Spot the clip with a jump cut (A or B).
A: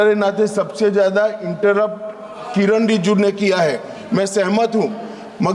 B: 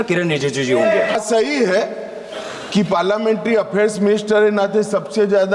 B